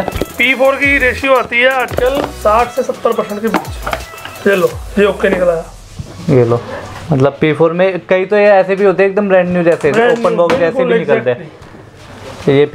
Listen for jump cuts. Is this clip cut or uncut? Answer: uncut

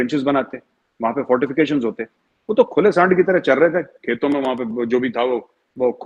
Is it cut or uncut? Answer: uncut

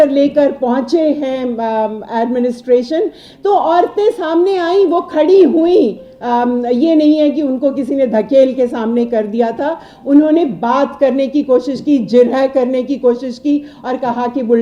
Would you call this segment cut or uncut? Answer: uncut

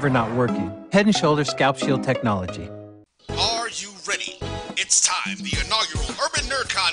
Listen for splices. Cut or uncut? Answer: cut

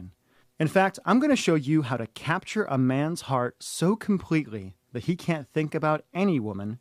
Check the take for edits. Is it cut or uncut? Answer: uncut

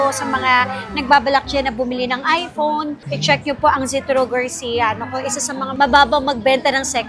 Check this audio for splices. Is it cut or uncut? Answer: uncut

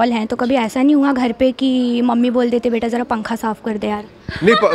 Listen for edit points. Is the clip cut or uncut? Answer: uncut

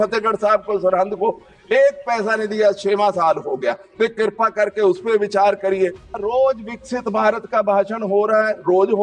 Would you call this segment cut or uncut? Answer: cut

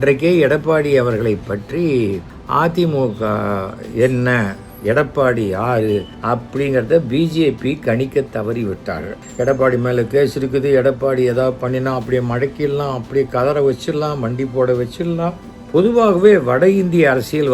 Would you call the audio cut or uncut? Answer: cut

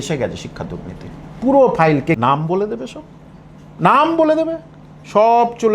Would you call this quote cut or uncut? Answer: cut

